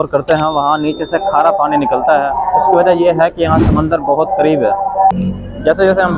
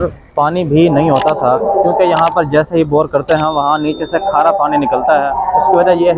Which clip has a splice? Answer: first; 1 cut; at 5.1 s

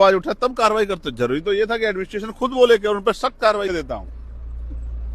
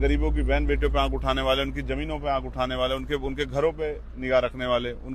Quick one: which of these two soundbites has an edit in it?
first; 1 cut; at 3.7 s

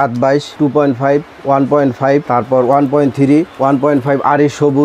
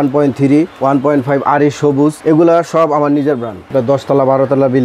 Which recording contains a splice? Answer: second; 1 cut; at 3.7 s

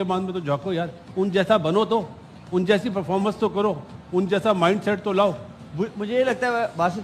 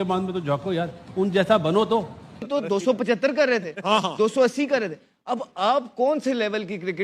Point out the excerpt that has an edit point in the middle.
second; 1 cut; at 2.4 s

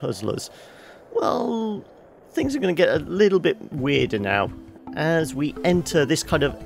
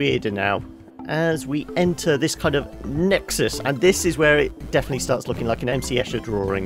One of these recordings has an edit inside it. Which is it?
second; 1 cut; at 5.7 s

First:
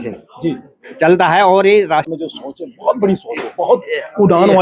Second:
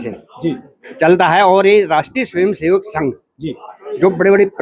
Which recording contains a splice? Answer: first; 1 cut; at 2.1 s

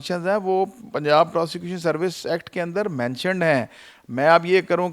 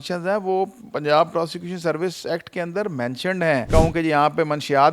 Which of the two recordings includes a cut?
second; 1 cut; at 3.7 s

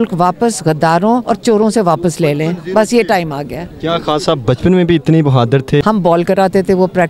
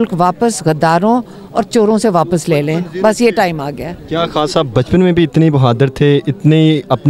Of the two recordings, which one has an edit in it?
first; 2 cuts; at 1.2 s, 5.8 s

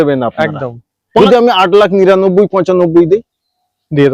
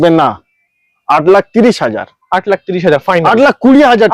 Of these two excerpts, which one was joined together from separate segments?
first; 1 cut; at 1.2 s

